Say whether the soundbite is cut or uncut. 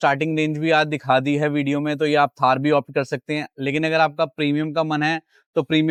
uncut